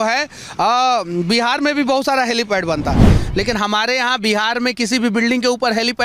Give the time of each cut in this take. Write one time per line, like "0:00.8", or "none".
0:03.1